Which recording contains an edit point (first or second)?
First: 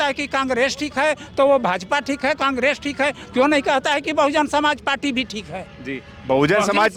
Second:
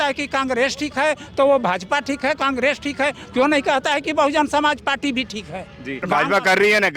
second